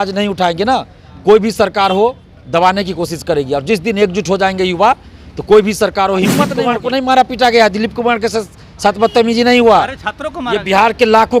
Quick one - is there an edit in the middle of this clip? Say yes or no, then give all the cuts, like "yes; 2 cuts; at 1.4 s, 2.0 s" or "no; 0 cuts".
yes; 1 cut; at 6.6 s